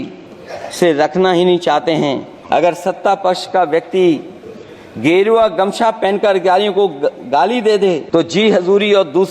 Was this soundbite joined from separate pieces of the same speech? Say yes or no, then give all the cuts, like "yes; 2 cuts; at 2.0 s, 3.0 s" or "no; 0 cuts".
yes; 2 cuts; at 2.3 s, 8.0 s